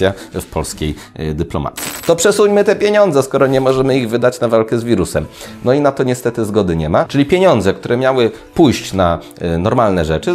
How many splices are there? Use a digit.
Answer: 1